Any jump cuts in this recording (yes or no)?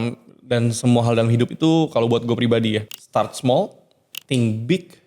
yes